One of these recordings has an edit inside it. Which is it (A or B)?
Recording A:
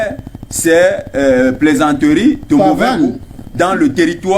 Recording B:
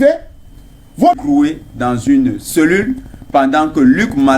B